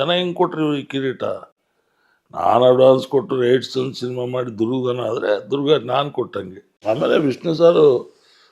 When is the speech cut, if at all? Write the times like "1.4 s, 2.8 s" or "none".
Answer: 6.7 s